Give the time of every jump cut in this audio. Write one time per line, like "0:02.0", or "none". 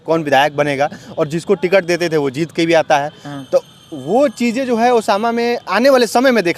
none